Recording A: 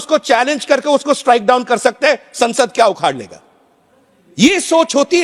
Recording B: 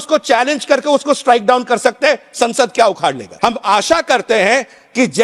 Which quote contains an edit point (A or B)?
B